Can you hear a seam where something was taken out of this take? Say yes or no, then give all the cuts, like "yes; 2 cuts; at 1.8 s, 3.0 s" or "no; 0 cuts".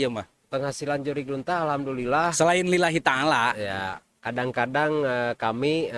no; 0 cuts